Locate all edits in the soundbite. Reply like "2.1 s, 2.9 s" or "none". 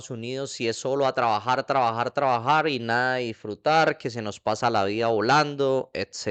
none